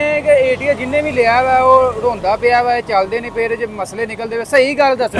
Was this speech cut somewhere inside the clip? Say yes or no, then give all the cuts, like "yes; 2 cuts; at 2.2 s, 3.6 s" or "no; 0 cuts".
no; 0 cuts